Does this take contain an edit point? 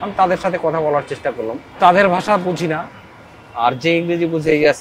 yes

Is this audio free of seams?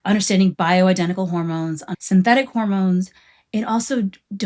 no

